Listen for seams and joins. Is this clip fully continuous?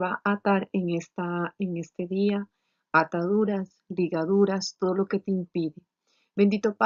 yes; 0 cuts

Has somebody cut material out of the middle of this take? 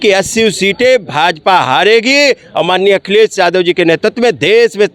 no; 0 cuts

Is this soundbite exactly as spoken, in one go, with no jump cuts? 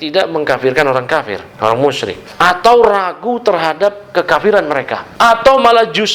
no; 3 cuts; at 1.4 s, 2.2 s, 5.0 s

